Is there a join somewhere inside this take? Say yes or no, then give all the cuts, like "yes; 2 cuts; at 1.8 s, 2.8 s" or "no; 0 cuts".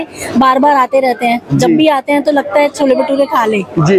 no; 0 cuts